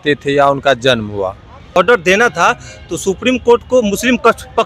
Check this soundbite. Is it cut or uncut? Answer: cut